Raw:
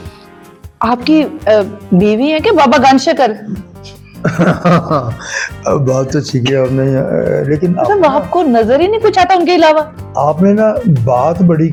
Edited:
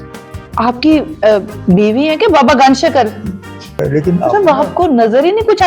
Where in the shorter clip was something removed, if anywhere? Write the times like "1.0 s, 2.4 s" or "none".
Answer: 3.8 s